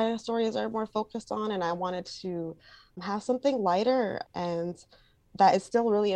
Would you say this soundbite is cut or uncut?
cut